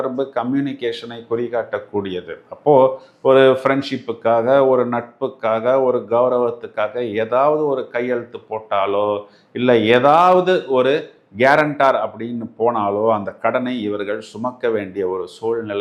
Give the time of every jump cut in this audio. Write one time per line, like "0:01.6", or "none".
none